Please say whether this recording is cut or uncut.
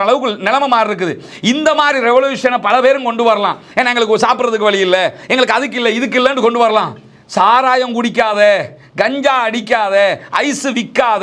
uncut